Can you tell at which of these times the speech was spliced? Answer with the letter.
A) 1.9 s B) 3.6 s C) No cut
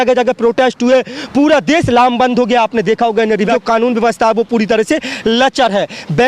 B